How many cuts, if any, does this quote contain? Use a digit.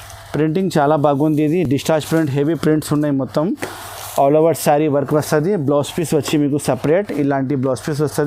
0